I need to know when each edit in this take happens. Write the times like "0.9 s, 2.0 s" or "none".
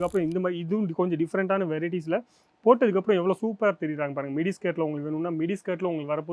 none